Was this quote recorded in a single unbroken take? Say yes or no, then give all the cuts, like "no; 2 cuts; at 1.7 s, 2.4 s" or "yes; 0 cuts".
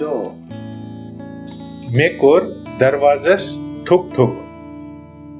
no; 1 cut; at 4.3 s